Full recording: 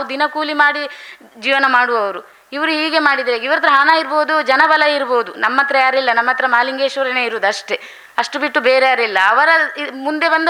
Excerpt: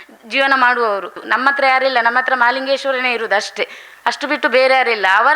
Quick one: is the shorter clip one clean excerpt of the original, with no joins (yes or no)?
no